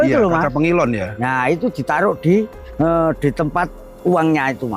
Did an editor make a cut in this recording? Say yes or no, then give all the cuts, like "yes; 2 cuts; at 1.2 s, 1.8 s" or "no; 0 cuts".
yes; 1 cut; at 2.6 s